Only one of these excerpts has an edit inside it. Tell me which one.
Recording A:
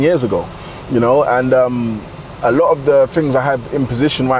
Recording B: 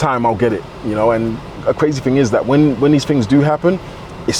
B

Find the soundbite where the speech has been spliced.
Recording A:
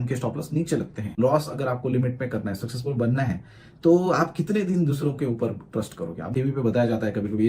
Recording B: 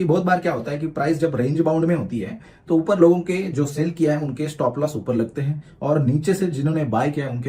A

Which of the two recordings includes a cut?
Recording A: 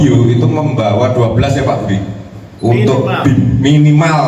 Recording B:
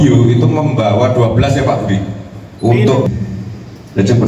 B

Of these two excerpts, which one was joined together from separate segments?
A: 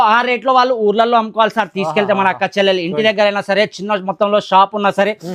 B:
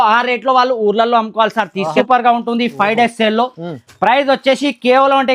B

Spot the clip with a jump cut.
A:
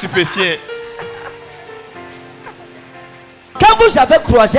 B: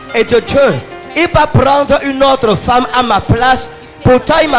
A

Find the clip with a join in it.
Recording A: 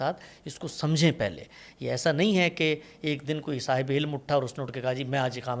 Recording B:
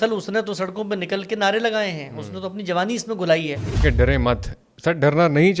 B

